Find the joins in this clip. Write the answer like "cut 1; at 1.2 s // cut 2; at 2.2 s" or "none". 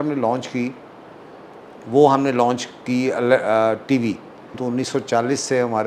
cut 1; at 4.5 s